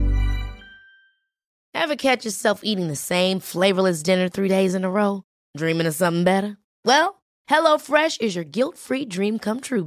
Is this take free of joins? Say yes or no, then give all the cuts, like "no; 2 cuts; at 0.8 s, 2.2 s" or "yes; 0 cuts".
no; 1 cut; at 1.0 s